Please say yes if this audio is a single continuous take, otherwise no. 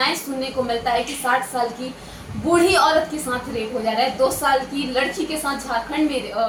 yes